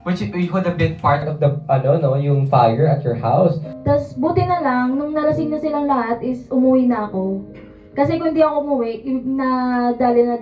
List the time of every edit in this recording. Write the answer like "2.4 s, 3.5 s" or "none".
3.7 s